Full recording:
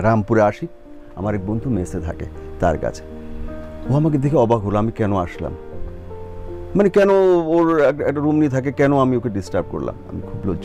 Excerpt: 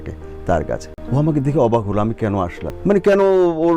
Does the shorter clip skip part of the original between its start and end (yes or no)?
yes